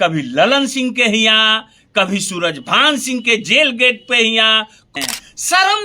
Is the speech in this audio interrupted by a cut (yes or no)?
yes